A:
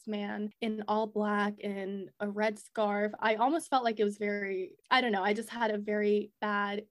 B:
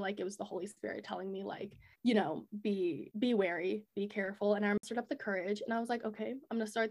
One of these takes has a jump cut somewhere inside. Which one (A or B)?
B